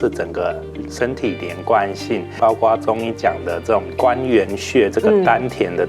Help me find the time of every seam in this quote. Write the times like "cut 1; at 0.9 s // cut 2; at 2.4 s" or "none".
cut 1; at 2.3 s